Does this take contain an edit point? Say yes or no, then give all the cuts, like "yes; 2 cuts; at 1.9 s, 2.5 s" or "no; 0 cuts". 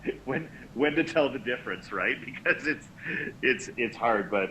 no; 0 cuts